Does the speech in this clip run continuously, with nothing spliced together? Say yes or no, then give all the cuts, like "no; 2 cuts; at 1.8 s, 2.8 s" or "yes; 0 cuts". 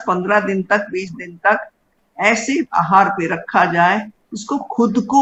yes; 0 cuts